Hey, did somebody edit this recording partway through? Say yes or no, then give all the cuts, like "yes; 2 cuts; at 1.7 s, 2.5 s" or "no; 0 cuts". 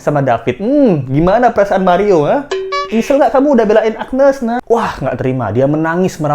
yes; 1 cut; at 4.6 s